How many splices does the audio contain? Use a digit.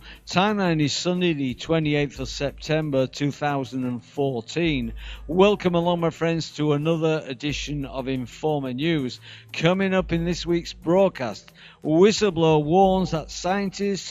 1